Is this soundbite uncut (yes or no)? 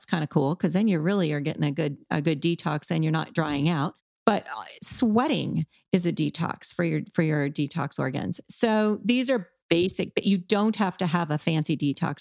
no